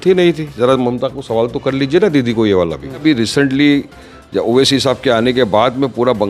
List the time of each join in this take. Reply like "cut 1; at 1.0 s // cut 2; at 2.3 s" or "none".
cut 1; at 3.0 s